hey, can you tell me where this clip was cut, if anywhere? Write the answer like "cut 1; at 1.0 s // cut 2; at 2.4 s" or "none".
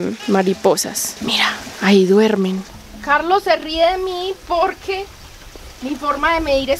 cut 1; at 2.6 s